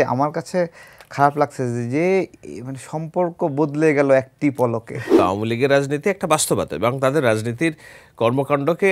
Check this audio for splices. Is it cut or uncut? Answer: cut